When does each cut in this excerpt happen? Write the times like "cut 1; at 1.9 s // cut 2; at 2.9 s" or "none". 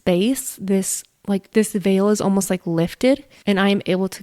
cut 1; at 1.5 s